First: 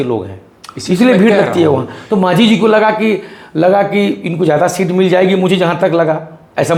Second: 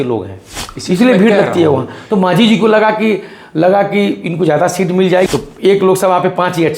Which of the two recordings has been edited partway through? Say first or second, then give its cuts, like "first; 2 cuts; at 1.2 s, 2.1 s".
second; 1 cut; at 5.3 s